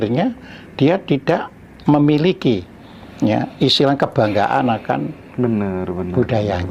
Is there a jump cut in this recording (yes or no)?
no